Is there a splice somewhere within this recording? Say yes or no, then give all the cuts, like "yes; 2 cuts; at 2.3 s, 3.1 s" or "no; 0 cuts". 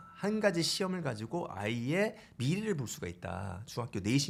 no; 0 cuts